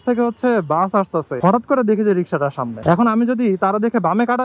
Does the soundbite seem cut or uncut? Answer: cut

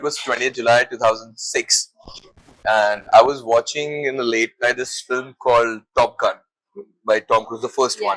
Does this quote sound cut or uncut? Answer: uncut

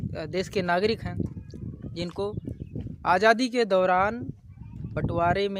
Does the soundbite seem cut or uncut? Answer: uncut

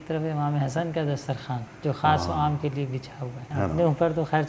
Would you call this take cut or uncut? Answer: cut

